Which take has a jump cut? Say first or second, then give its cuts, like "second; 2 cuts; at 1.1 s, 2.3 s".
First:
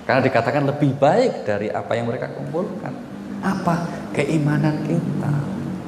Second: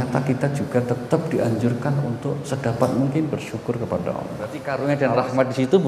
second; 1 cut; at 4.7 s